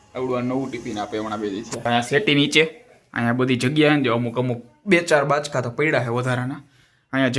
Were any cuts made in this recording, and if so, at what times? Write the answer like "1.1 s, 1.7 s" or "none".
1.9 s